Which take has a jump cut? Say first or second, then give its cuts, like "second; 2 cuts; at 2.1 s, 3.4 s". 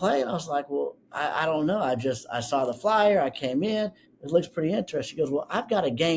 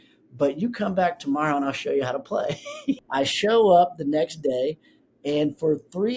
second; 1 cut; at 3.0 s